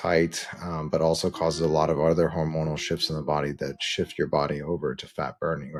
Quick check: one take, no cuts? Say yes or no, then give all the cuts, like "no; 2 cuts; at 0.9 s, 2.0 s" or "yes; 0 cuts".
yes; 0 cuts